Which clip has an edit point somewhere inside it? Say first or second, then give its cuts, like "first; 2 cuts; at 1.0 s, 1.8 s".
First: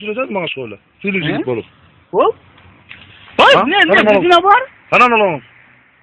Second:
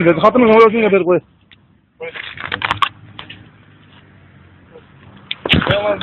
first; 1 cut; at 4.8 s